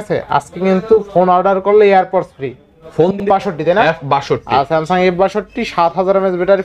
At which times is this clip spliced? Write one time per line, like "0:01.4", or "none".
0:03.2